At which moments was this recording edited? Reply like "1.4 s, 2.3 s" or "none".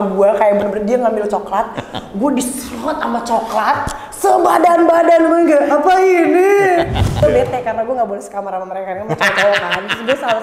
7.1 s

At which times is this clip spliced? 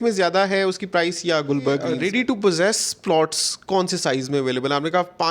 2.0 s

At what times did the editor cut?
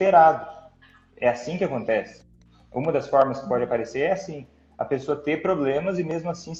none

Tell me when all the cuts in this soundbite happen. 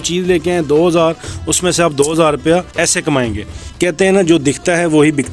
2.7 s, 3.7 s

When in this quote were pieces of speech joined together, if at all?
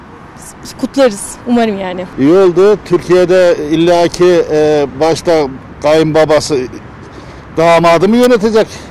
none

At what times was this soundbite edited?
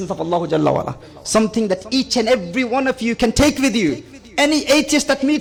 none

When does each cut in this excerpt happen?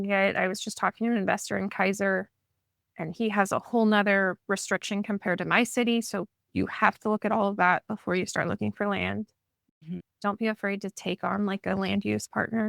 10.1 s

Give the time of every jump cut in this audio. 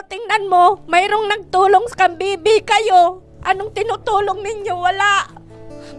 none

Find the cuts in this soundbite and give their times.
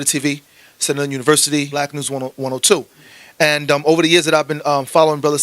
1.7 s

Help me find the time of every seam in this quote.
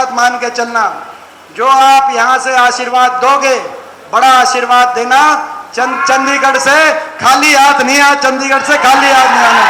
none

